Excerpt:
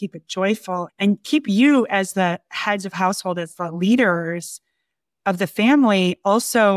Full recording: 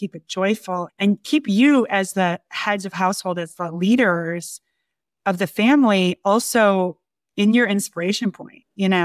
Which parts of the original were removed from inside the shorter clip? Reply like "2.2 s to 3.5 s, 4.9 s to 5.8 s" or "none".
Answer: none